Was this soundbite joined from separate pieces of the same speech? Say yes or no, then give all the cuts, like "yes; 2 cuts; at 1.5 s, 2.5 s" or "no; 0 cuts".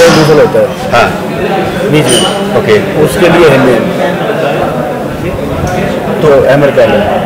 no; 0 cuts